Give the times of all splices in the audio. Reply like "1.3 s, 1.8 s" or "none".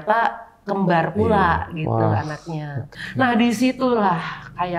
2.8 s